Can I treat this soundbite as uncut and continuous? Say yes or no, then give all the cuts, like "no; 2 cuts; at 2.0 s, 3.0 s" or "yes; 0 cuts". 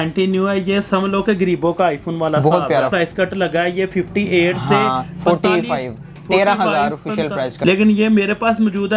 no; 2 cuts; at 2.9 s, 7.5 s